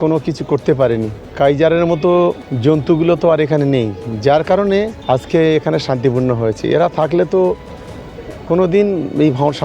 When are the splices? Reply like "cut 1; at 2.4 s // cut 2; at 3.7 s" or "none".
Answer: cut 1; at 1.2 s // cut 2; at 2.5 s // cut 3; at 5.0 s

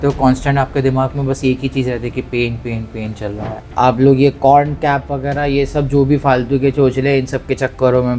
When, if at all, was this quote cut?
cut 1; at 3.5 s

